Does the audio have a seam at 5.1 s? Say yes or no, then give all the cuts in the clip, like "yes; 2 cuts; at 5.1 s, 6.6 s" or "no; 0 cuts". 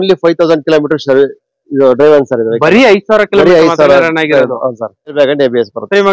yes; 1 cut; at 5.1 s